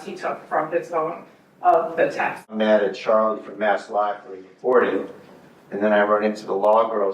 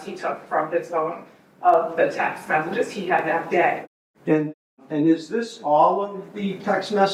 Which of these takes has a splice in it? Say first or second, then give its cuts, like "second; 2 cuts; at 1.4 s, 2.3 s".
first; 1 cut; at 2.4 s